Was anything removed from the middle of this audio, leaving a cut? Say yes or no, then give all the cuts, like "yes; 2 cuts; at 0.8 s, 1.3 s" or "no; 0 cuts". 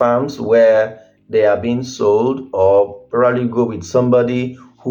no; 0 cuts